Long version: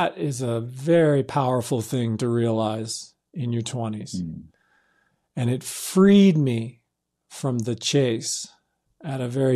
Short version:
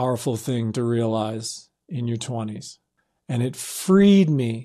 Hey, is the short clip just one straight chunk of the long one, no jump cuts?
no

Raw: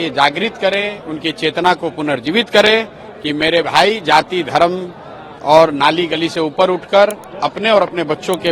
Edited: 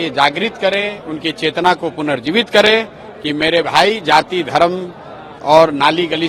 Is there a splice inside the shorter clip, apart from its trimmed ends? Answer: no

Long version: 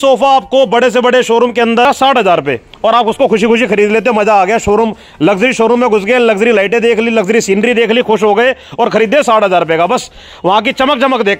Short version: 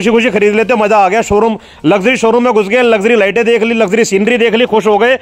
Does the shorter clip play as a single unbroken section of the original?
yes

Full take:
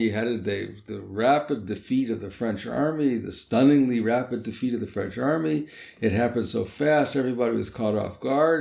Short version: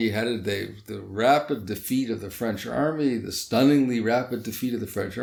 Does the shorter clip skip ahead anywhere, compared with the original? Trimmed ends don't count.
no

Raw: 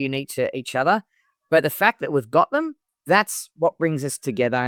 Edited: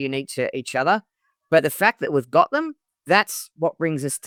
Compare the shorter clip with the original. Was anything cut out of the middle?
no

